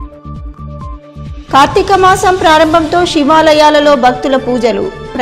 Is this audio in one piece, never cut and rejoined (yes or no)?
yes